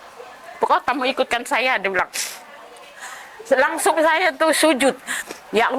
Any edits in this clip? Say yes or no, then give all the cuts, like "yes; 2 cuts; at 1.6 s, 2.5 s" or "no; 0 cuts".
no; 0 cuts